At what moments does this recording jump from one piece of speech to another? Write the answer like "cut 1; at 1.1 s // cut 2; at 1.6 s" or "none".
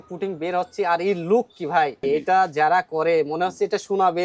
cut 1; at 2.0 s

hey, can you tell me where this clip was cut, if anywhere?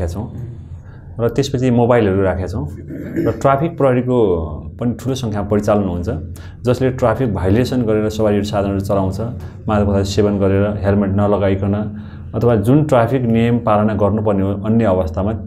none

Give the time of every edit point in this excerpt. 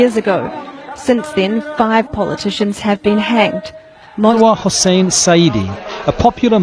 cut 1; at 4.3 s

